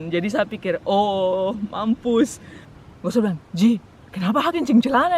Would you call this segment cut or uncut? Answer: cut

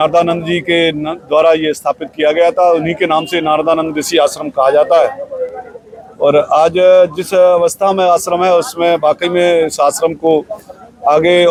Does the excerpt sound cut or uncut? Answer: uncut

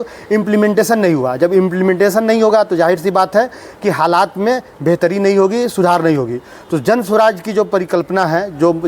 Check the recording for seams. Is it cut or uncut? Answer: uncut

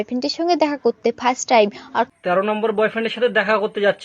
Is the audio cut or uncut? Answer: cut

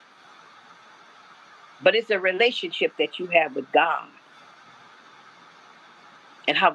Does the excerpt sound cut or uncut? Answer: uncut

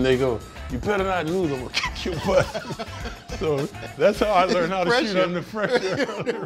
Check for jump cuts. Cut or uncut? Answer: uncut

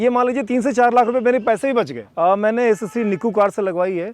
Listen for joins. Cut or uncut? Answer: cut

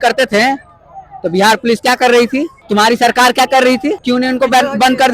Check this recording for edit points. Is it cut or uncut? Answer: cut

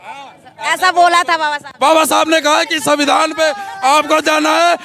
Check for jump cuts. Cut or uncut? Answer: uncut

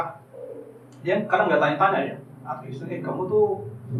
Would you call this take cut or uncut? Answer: uncut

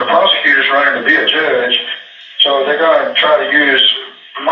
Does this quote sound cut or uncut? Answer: uncut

